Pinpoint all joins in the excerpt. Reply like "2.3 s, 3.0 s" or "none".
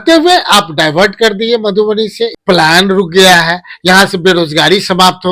2.4 s